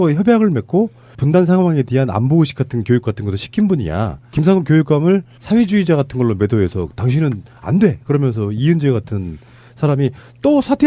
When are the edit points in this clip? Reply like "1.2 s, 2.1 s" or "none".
none